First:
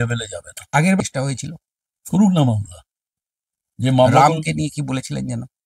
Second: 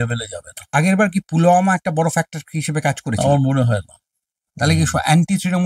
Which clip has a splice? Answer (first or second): first